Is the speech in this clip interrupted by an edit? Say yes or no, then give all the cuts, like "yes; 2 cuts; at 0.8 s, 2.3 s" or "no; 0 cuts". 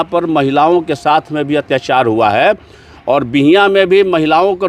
no; 0 cuts